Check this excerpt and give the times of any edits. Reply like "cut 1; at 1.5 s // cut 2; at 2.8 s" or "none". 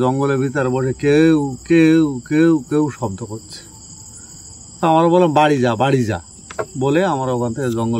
none